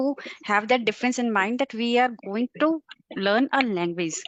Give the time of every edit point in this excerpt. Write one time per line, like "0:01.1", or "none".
none